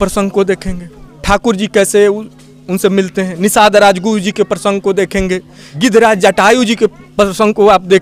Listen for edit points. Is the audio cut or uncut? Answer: uncut